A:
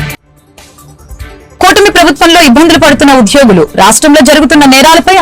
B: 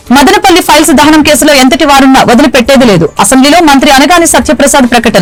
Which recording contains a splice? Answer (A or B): A